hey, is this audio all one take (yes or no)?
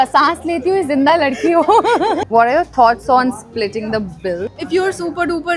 no